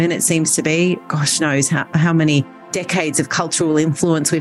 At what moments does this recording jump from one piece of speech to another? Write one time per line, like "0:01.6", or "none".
none